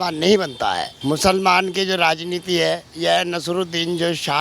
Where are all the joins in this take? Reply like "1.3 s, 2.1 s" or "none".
0.9 s